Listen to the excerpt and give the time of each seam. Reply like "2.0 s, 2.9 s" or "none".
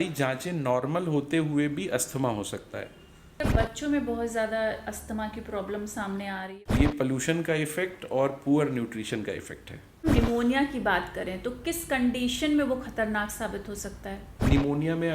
3.4 s, 6.4 s, 10.1 s, 14.2 s